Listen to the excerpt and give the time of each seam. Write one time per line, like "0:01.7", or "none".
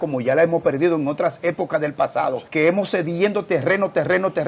0:02.4